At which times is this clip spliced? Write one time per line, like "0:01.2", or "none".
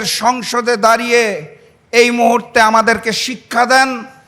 none